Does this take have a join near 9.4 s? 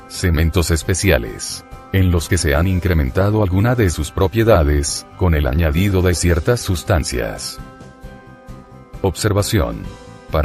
yes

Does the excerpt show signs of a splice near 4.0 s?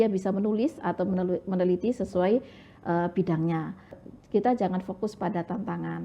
yes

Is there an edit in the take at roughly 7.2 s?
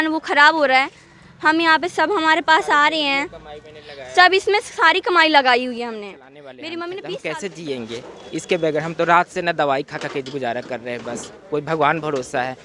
yes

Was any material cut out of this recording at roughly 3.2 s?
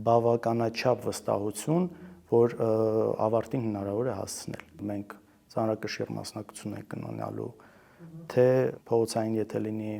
no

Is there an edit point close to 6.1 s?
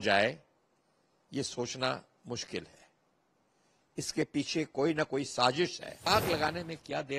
yes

